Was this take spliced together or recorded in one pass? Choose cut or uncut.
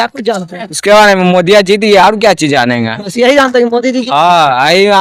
uncut